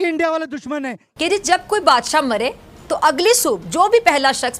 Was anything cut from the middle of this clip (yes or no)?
yes